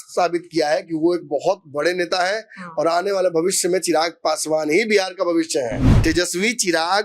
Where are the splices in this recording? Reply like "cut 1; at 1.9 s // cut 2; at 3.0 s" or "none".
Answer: cut 1; at 5.9 s